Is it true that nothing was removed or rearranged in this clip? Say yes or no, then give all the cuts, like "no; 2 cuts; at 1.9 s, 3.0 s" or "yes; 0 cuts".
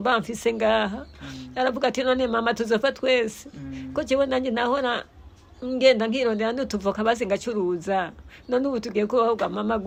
yes; 0 cuts